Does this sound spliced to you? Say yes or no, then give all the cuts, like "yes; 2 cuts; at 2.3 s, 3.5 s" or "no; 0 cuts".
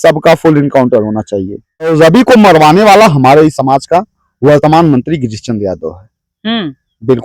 yes; 1 cut; at 1.9 s